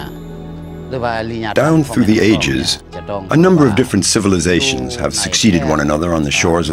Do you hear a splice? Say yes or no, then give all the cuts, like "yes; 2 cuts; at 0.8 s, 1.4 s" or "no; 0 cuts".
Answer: yes; 1 cut; at 1.5 s